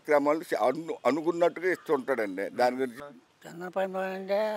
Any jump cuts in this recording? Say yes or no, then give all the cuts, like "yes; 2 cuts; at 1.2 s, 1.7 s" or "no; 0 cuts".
yes; 1 cut; at 3.0 s